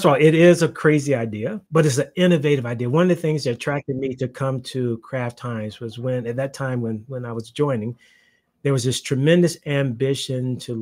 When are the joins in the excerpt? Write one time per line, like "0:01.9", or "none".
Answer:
0:01.6